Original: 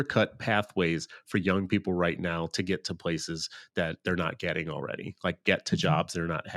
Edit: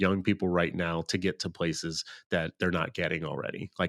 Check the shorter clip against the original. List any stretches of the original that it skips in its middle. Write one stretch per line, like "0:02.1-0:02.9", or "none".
none